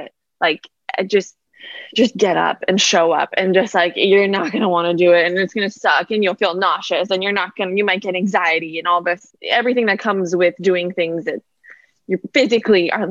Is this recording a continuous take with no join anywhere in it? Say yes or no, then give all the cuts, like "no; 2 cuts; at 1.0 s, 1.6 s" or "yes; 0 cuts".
no; 1 cut; at 9.3 s